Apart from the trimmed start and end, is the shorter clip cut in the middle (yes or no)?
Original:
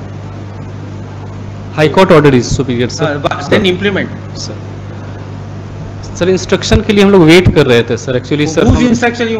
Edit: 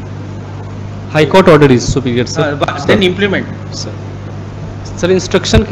yes